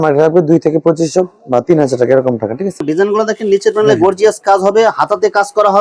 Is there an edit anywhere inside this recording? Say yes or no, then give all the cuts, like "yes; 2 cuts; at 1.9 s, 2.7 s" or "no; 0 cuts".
yes; 1 cut; at 2.8 s